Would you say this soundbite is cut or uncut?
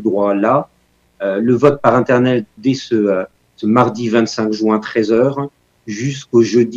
cut